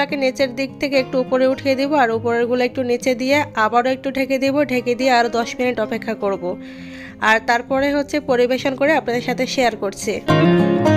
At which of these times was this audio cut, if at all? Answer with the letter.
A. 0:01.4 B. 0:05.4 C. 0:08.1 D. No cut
D